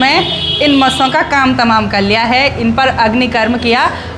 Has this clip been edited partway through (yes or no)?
no